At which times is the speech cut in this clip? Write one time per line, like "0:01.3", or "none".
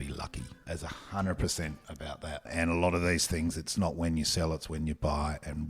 0:02.4